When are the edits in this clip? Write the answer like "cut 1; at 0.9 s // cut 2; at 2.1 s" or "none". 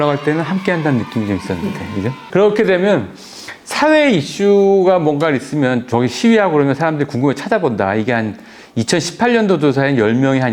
none